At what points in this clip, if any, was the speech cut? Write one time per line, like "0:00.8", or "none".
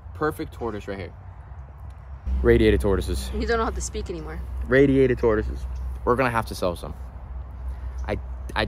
0:02.3